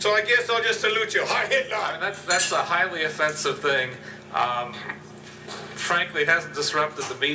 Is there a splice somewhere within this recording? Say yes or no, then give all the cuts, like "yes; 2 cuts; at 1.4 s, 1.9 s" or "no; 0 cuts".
yes; 1 cut; at 2.0 s